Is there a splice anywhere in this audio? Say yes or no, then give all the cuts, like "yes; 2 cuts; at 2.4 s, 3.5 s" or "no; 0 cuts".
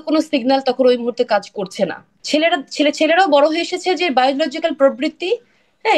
yes; 1 cut; at 2.1 s